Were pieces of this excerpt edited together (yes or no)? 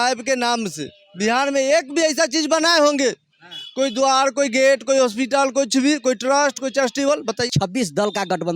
yes